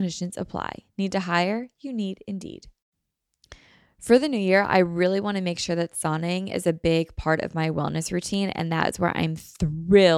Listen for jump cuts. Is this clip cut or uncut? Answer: cut